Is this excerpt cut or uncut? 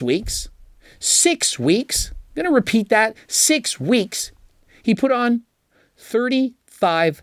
uncut